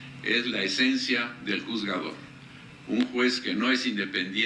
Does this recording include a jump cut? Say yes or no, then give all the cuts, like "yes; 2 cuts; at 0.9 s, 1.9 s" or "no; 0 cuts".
no; 0 cuts